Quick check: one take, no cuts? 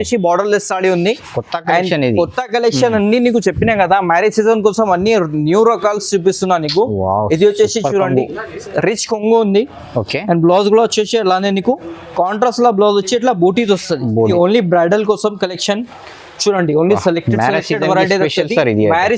no; 1 cut; at 14.3 s

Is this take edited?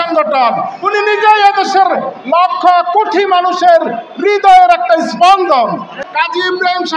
yes; 1 cut; at 6.0 s

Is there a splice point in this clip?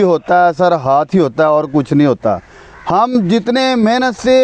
no; 0 cuts

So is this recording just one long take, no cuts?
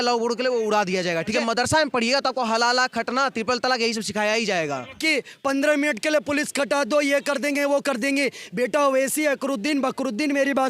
no; 2 cuts; at 1.3 s, 5.0 s

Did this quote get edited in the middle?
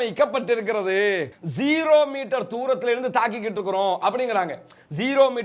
yes; 1 cut; at 1.3 s

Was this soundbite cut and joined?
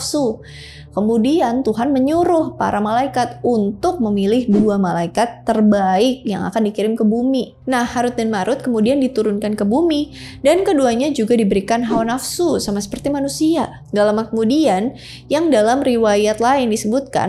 yes; 2 cuts; at 7.5 s, 13.8 s

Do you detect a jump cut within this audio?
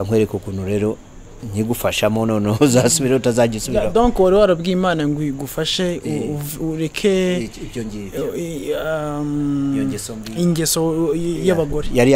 no; 0 cuts

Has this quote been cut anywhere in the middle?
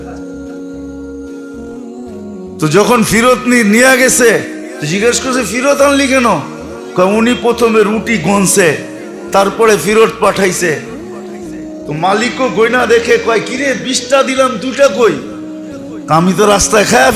yes; 1 cut; at 2.6 s

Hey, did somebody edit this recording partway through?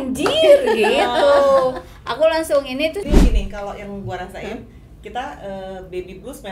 yes; 1 cut; at 3.2 s

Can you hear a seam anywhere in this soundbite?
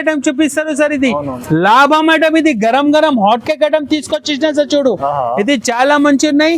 no; 0 cuts

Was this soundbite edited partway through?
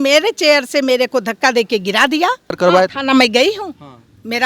yes; 1 cut; at 2.6 s

